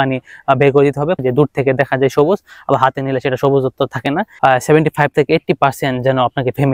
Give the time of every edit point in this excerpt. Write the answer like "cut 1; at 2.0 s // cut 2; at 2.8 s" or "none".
cut 1; at 1.2 s // cut 2; at 4.3 s